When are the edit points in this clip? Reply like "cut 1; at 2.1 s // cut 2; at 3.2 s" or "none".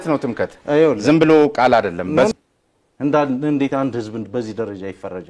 cut 1; at 2.3 s